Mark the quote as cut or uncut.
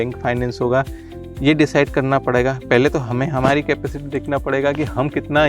uncut